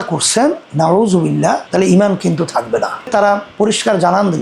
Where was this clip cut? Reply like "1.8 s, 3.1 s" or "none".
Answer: 3.1 s